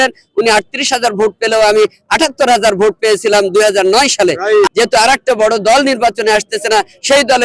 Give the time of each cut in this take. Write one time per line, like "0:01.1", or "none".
0:04.7